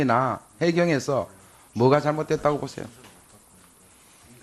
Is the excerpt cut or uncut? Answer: uncut